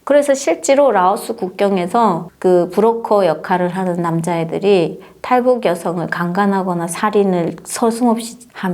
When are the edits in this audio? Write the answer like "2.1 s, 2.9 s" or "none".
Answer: 2.3 s